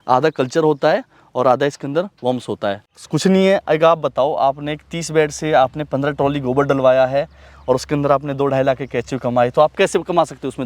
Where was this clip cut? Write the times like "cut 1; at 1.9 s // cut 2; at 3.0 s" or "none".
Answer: cut 1; at 2.8 s